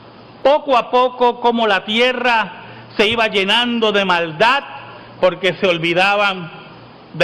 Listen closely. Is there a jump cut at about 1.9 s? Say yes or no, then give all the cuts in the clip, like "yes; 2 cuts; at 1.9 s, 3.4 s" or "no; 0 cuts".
yes; 1 cut; at 1.9 s